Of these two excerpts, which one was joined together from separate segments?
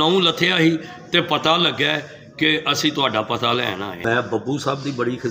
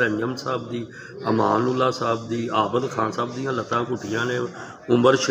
first; 1 cut; at 4.0 s

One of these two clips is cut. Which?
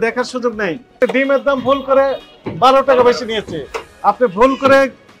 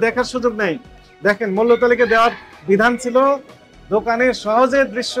first; 1 cut; at 1.0 s

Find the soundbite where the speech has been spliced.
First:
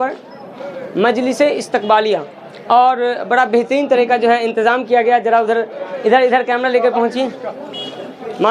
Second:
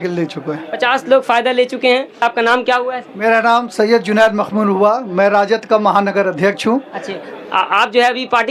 second; 1 cut; at 2.2 s

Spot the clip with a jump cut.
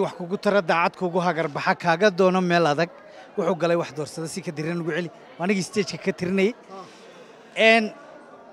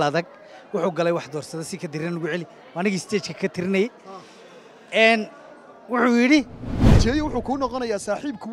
second; 1 cut; at 6.8 s

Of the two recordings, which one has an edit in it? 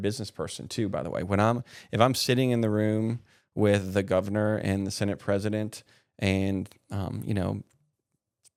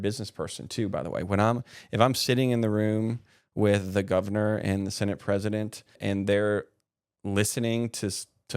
second; 1 cut; at 6.0 s

